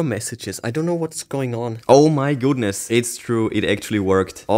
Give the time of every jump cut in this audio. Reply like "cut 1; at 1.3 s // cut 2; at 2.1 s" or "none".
cut 1; at 1.8 s // cut 2; at 2.8 s